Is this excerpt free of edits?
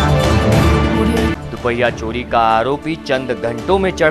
no; 1 cut; at 1.0 s

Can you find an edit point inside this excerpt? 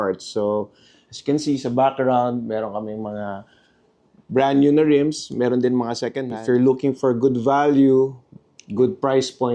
yes; 2 cuts; at 6.3 s, 8.4 s

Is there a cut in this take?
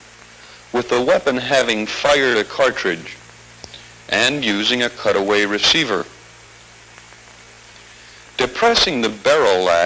no; 0 cuts

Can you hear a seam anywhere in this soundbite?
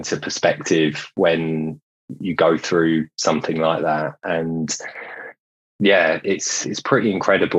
yes; 1 cut; at 5.4 s

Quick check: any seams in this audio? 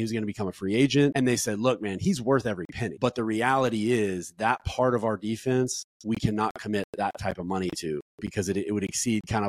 yes; 2 cuts; at 1.1 s, 2.8 s

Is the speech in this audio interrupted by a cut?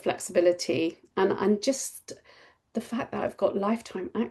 no; 0 cuts

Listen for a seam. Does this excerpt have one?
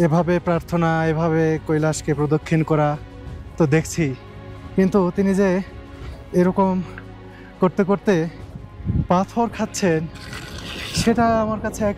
no; 0 cuts

